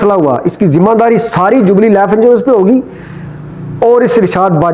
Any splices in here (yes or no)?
no